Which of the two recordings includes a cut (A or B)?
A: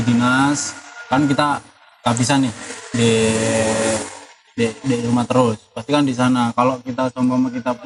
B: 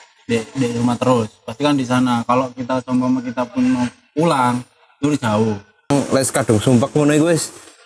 B